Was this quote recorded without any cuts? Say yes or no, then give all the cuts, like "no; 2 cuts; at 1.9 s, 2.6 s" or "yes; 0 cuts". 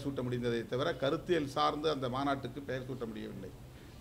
yes; 0 cuts